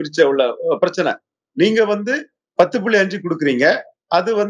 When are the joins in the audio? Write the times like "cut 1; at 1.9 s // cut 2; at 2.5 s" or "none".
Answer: none